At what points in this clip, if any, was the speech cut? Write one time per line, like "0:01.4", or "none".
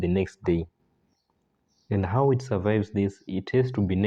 none